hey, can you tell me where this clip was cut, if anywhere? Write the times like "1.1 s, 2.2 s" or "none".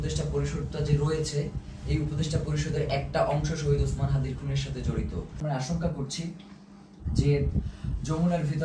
5.4 s